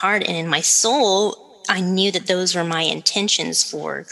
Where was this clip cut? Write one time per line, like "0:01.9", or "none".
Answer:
none